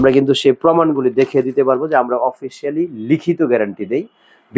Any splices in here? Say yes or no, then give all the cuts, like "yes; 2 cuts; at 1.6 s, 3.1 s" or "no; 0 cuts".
no; 0 cuts